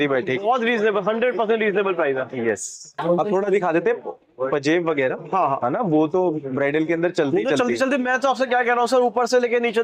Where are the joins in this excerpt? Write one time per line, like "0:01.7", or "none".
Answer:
none